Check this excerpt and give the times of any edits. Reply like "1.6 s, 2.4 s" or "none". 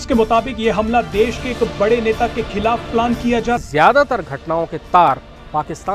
3.6 s